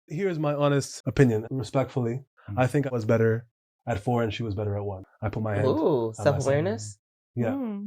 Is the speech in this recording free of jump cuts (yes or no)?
no